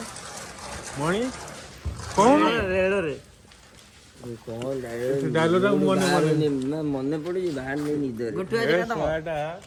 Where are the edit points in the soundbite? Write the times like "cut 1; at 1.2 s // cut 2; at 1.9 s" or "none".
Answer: none